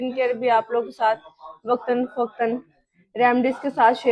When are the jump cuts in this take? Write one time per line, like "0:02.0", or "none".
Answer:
none